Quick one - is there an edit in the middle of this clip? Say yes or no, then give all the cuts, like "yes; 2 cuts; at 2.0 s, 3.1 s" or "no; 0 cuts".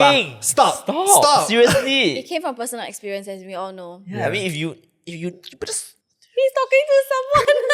no; 0 cuts